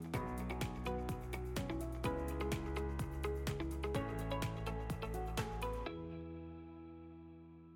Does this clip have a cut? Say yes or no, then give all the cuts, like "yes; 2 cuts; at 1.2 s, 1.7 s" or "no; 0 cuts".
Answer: no; 0 cuts